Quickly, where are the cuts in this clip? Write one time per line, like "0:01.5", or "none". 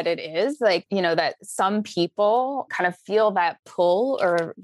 0:00.9
0:02.7